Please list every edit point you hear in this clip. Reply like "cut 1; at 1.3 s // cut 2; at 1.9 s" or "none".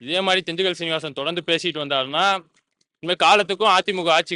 none